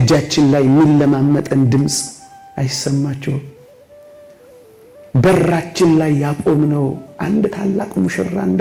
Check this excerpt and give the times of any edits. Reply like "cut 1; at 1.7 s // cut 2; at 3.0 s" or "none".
none